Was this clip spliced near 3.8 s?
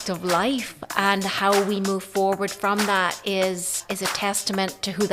yes; 1 cut; at 3.8 s

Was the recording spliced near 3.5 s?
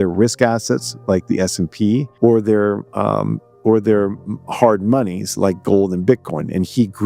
no; 1 cut; at 2.1 s

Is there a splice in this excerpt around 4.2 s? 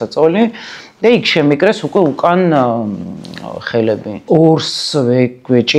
yes; 1 cut; at 4.2 s

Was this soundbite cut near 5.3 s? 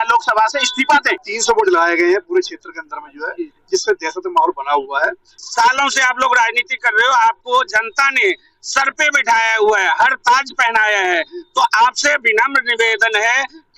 yes; 2 cuts; at 1.3 s, 5.3 s

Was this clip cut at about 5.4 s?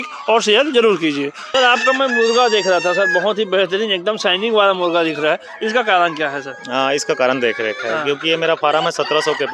no; 1 cut; at 1.4 s

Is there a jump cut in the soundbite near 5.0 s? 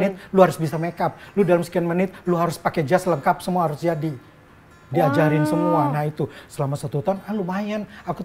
no; 0 cuts

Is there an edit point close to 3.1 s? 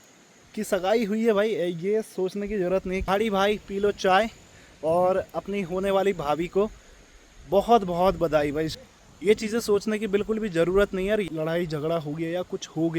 yes; 3 cuts; at 3.1 s, 8.7 s, 11.3 s

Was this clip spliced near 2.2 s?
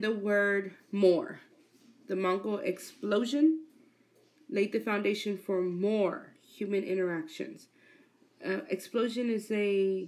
no; 1 cut; at 6.7 s

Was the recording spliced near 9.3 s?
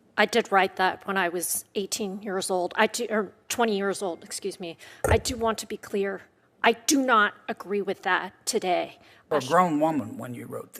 yes; 1 cut; at 9.3 s

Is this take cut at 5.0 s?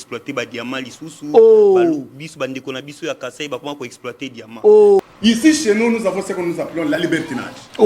yes; 1 cut; at 5.0 s

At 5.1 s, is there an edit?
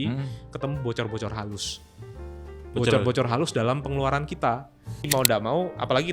yes; 1 cut; at 5.1 s

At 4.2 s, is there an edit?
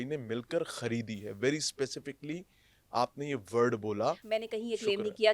yes; 1 cut; at 4.2 s

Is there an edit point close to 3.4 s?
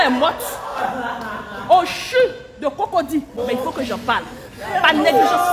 yes; 1 cut; at 3.4 s

